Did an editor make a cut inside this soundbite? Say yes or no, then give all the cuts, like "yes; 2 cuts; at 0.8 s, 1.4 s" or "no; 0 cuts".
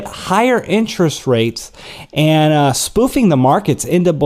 no; 0 cuts